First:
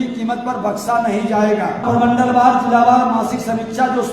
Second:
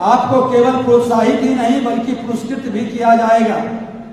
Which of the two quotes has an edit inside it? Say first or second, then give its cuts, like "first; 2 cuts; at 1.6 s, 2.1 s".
first; 1 cut; at 1.8 s